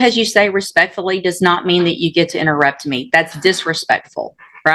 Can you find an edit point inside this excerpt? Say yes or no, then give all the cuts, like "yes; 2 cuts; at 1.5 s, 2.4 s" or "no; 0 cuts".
no; 0 cuts